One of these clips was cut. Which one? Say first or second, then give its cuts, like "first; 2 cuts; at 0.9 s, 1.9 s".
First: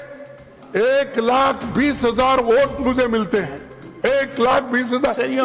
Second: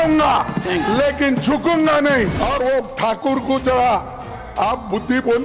second; 1 cut; at 2.3 s